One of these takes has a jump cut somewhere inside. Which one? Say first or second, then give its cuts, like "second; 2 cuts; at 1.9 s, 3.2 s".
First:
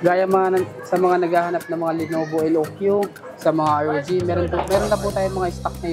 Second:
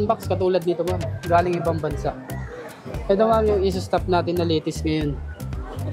second; 1 cut; at 1.1 s